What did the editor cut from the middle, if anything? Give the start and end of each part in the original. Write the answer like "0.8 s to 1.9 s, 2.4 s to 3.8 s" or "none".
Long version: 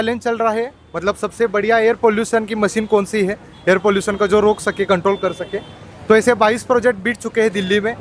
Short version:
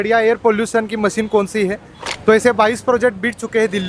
3.5 s to 5.7 s